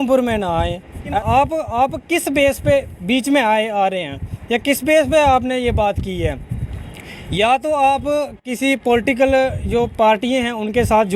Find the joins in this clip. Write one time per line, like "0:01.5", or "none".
0:01.2